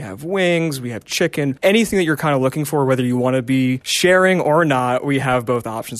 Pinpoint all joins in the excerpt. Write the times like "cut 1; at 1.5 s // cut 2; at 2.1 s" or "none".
cut 1; at 1.6 s